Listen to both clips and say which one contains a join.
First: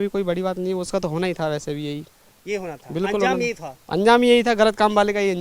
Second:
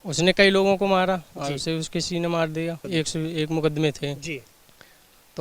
second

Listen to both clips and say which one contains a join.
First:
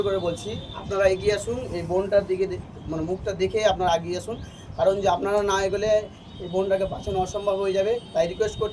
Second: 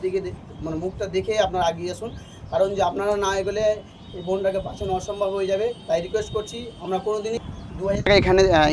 second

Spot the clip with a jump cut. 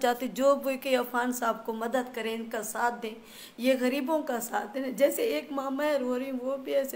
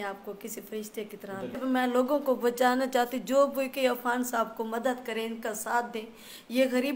second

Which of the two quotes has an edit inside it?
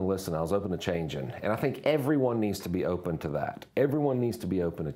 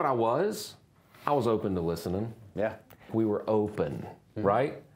second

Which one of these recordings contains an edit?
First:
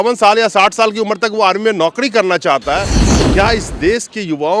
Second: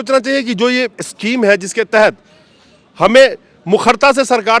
first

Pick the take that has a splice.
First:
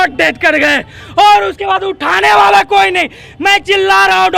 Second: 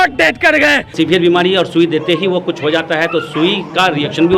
second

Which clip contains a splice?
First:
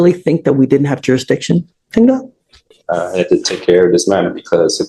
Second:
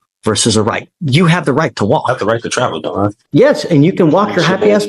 second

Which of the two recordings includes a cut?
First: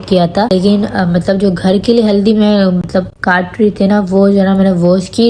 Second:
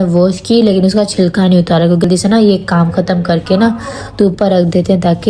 second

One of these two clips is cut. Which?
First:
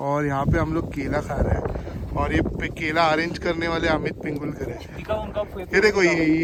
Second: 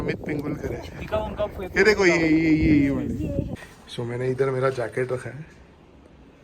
second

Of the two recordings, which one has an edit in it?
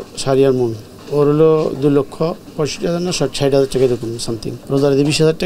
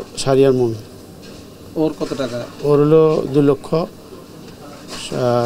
first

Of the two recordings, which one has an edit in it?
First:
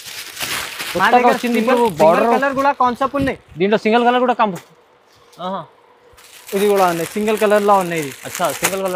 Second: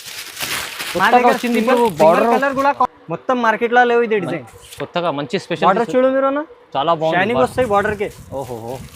second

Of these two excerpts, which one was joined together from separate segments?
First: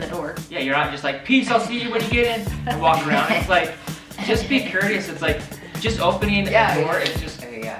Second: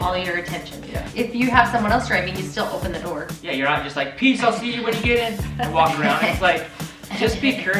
second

